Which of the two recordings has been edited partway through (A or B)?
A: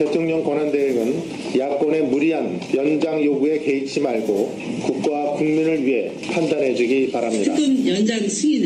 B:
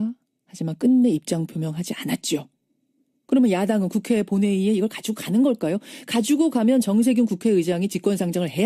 B